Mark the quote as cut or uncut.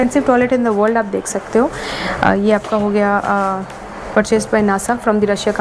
uncut